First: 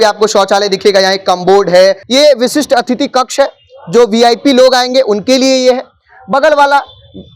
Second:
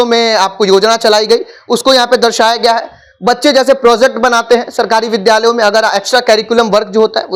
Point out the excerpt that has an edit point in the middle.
first; 1 cut; at 2.0 s

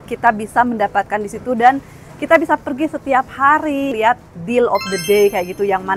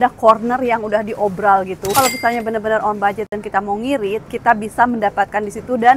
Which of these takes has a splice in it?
first; 1 cut; at 3.9 s

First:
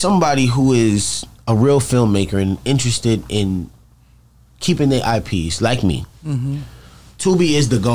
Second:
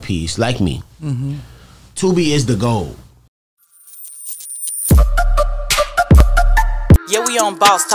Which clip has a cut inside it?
second; 1 cut; at 3.7 s

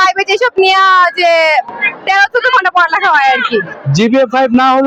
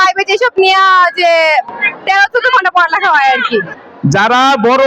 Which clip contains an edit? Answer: second; 1 cut; at 3.8 s

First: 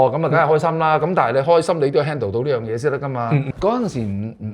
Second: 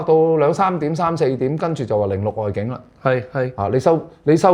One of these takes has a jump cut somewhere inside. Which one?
first; 1 cut; at 3.5 s

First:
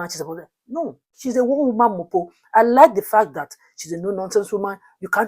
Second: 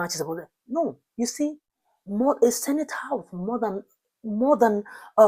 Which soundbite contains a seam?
first; 1 cut; at 1.1 s

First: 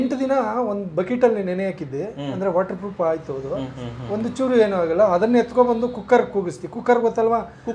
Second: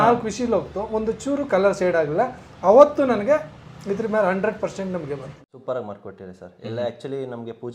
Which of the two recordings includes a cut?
second; 1 cut; at 5.3 s

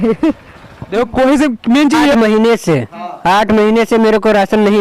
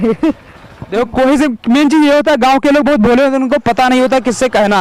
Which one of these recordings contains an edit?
first; 1 cut; at 2.1 s

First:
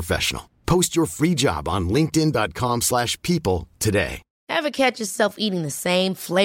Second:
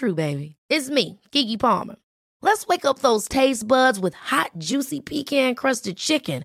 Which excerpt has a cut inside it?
first; 1 cut; at 4.3 s

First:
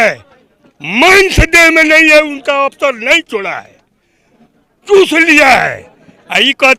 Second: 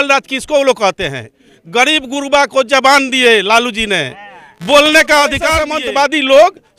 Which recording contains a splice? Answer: second; 1 cut; at 5.7 s

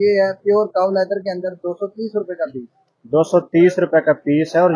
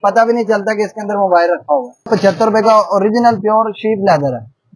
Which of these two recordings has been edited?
second; 1 cut; at 2.1 s

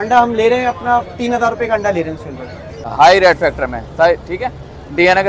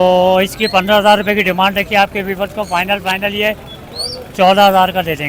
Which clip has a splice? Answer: first; 1 cut; at 2.8 s

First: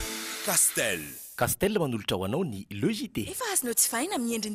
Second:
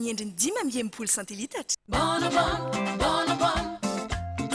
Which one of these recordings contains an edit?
second; 1 cut; at 1.7 s

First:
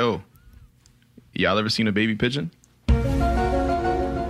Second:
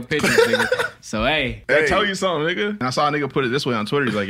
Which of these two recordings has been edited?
second; 2 cuts; at 1.6 s, 3.3 s

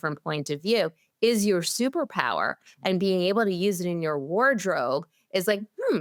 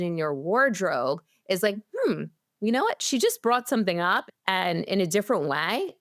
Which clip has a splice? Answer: second; 1 cut; at 4.2 s

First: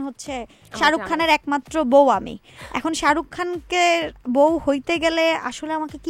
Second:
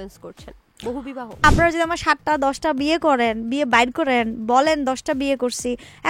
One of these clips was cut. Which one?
second; 1 cut; at 1.4 s

